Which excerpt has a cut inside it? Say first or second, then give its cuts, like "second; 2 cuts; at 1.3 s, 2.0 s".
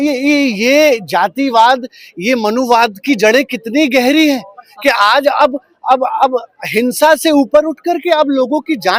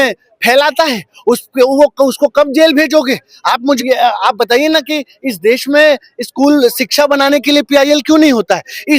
second; 1 cut; at 3.8 s